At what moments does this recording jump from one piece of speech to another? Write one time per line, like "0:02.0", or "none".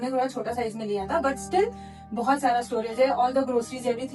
none